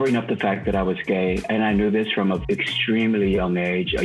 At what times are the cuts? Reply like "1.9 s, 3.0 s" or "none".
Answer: 2.4 s

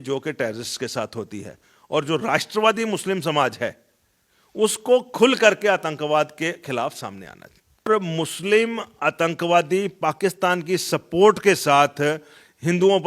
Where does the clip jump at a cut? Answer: 7.9 s

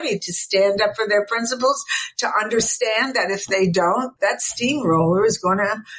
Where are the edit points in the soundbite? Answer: none

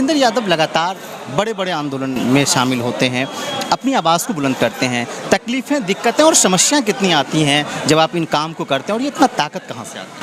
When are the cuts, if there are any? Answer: none

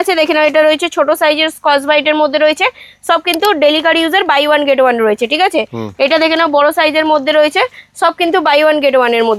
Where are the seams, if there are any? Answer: none

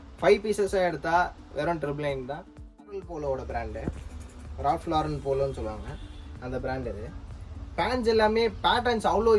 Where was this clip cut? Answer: 2.8 s

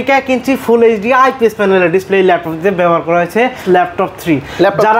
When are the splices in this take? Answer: 3.6 s

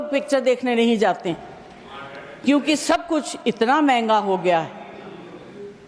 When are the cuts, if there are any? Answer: none

